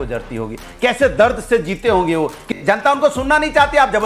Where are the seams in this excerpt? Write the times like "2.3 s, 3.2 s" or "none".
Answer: 0.9 s, 2.5 s